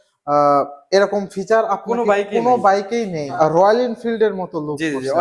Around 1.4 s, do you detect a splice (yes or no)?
no